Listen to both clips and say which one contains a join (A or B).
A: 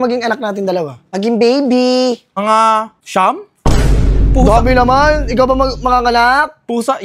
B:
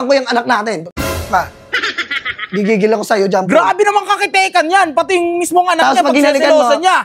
A